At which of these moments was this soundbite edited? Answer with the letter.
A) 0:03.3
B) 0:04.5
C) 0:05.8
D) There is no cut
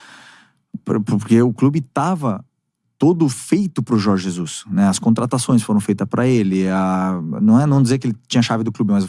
D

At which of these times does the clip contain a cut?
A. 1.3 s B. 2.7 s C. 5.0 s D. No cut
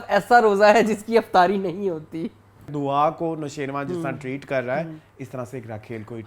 B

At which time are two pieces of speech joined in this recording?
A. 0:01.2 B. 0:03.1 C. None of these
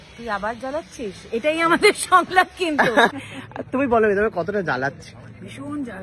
B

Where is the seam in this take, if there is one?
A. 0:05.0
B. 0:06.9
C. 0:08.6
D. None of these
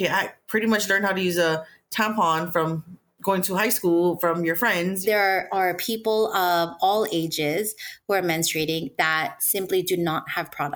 A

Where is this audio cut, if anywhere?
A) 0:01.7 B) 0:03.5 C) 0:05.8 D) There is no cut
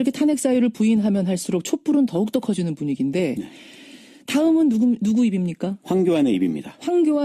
B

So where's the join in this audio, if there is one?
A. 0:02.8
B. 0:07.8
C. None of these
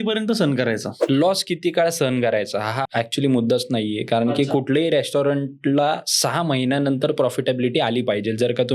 A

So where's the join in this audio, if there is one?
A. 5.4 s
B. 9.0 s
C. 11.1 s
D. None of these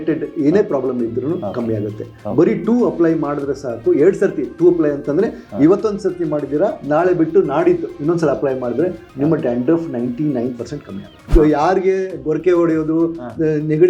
C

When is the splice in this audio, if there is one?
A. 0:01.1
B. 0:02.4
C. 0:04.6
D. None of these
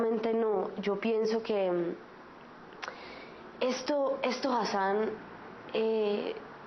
C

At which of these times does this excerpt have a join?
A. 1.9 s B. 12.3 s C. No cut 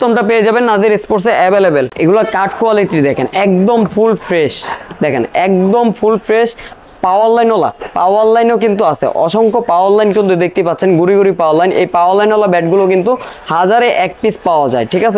A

